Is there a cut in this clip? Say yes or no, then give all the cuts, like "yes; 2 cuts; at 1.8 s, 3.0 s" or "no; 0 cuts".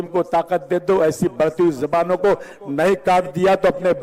no; 0 cuts